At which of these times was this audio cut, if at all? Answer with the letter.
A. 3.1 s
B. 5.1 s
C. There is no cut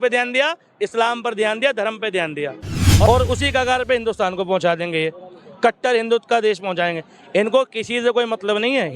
A